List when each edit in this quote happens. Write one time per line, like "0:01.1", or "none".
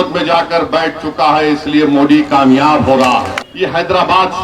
0:03.4